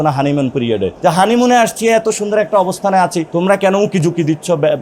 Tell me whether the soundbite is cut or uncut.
cut